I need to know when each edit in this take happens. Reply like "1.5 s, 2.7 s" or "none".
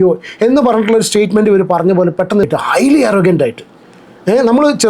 2.4 s